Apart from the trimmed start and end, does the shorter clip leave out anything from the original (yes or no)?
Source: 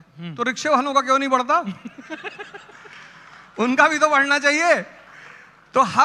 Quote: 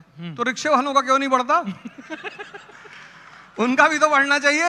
no